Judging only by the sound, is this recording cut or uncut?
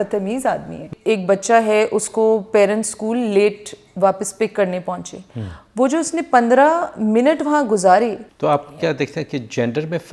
cut